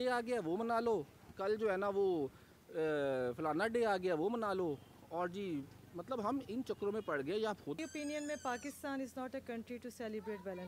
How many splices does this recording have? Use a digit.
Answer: 1